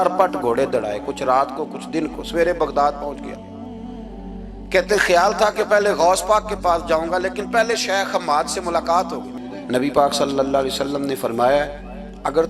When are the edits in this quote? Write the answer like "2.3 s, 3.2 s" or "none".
9.3 s